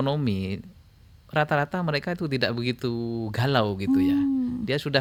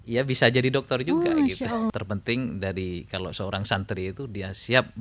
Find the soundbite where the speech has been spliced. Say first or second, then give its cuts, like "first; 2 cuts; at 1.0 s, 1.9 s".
second; 1 cut; at 1.9 s